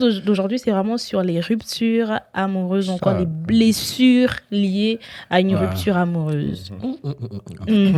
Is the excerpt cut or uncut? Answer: uncut